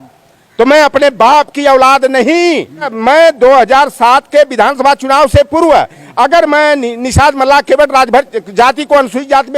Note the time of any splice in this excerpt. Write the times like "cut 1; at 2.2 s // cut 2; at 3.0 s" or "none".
cut 1; at 2.9 s

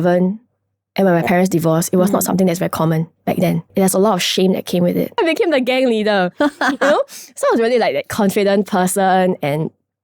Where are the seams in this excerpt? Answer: cut 1; at 3.7 s // cut 2; at 5.2 s

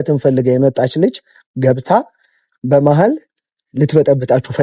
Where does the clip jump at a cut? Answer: none

